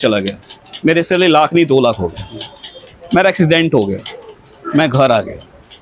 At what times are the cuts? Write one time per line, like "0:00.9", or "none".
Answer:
none